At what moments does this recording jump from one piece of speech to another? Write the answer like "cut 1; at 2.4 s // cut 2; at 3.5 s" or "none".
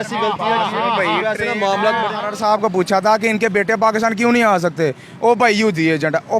cut 1; at 2.3 s